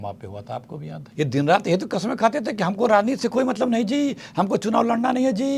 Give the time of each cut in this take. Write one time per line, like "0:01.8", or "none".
0:01.0